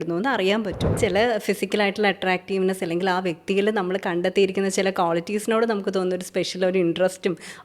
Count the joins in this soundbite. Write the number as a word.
one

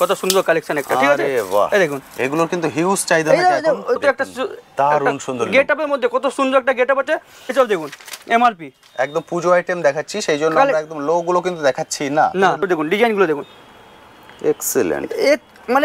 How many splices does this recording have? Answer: three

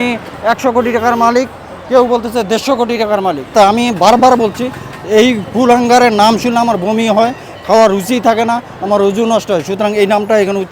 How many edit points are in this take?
one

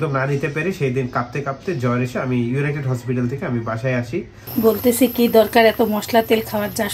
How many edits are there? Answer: one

